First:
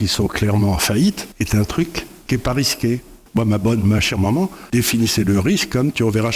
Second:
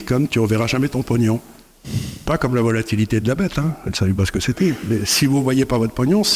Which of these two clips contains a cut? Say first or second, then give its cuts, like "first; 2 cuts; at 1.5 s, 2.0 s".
first; 4 cuts; at 1.3 s, 2.1 s, 3.2 s, 4.6 s